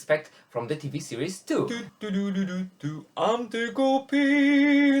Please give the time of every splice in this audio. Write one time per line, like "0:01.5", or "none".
0:01.8